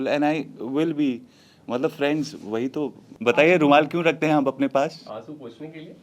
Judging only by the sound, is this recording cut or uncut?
cut